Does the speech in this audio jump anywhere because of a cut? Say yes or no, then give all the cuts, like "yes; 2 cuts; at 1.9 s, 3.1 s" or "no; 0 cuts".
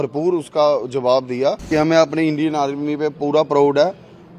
yes; 1 cut; at 1.7 s